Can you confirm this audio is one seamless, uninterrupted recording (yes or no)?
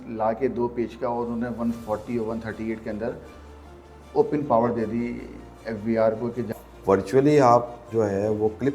no